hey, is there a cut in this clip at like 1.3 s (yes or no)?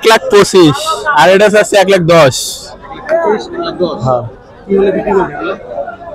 no